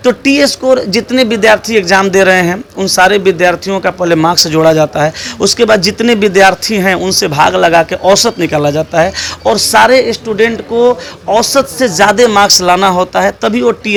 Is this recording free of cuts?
yes; 0 cuts

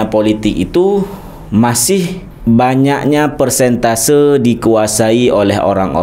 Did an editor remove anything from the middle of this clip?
yes; 1 cut; at 2.3 s

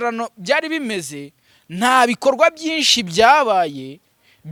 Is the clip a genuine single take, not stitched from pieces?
yes; 0 cuts

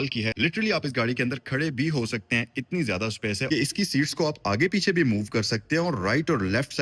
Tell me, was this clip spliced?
yes; 1 cut; at 3.4 s

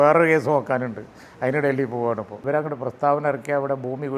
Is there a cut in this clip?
yes; 1 cut; at 2.4 s

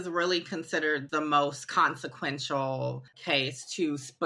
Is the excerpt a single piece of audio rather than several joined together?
no; 2 cuts; at 1.1 s, 3.1 s

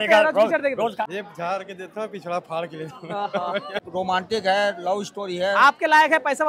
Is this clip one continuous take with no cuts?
no; 2 cuts; at 1.1 s, 3.8 s

